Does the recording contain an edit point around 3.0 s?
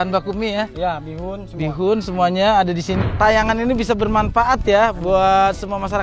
yes; 1 cut; at 3.0 s

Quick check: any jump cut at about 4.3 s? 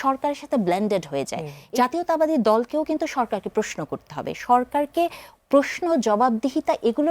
no; 1 cut; at 1.6 s

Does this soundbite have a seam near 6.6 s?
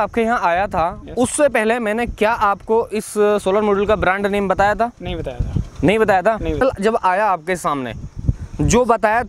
yes; 1 cut; at 6.6 s

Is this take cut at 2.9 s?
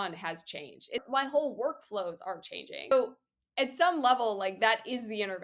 yes; 2 cuts; at 1.0 s, 2.9 s

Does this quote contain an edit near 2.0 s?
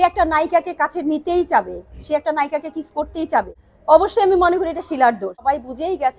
no; 2 cuts; at 3.8 s, 5.4 s

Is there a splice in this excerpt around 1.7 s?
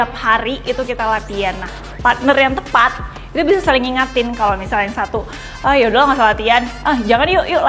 yes; 1 cut; at 1.7 s

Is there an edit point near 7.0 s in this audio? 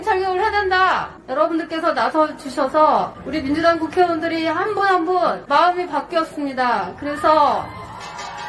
no; 3 cuts; at 1.2 s, 3.2 s, 5.4 s

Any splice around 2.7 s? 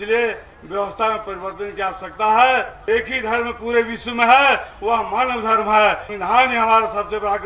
yes; 2 cuts; at 2.7 s, 6.1 s

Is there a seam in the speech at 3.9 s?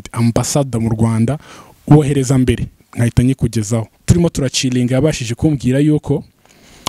yes; 1 cut; at 3.9 s

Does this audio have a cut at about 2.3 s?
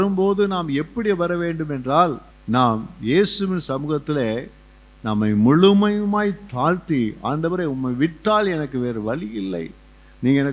yes; 1 cut; at 2.3 s

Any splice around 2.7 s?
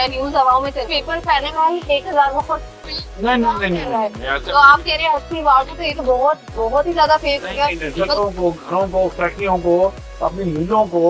no; 2 cuts; at 1.0 s, 8.1 s

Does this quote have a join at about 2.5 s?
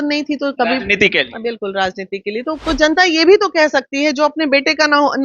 yes; 1 cut; at 2.5 s

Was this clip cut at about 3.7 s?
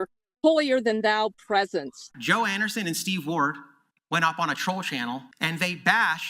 no; 2 cuts; at 2.1 s, 5.3 s

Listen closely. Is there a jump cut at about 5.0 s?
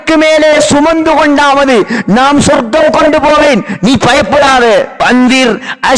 yes; 1 cut; at 5.0 s

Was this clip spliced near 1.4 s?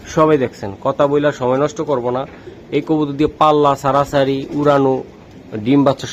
no; 0 cuts

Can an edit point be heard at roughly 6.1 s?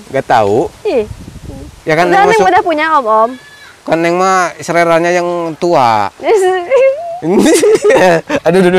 no; 0 cuts

